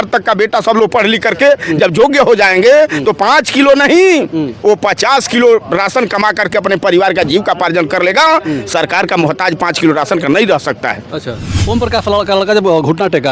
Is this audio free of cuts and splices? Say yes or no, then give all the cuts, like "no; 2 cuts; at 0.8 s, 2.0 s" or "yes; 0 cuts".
no; 1 cut; at 11.5 s